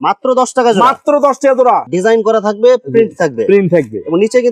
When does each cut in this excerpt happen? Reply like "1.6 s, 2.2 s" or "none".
1.8 s